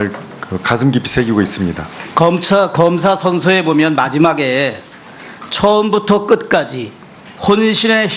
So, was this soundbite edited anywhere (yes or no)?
yes